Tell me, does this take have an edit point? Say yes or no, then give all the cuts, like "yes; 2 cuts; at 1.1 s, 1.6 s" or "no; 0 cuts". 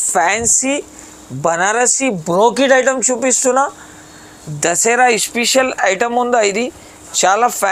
no; 0 cuts